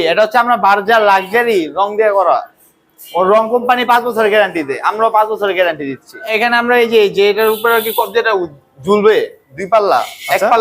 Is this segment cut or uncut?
cut